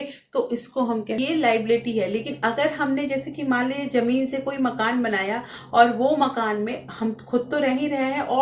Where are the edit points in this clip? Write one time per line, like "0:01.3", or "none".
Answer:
0:01.2